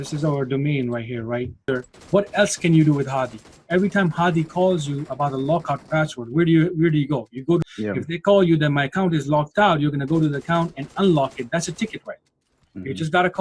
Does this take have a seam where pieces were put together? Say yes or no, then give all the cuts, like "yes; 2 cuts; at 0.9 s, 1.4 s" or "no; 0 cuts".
yes; 2 cuts; at 1.7 s, 7.6 s